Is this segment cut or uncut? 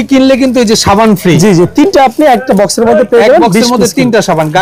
uncut